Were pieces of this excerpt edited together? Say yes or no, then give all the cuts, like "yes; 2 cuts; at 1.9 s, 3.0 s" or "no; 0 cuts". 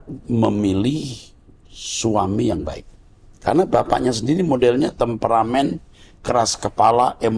no; 0 cuts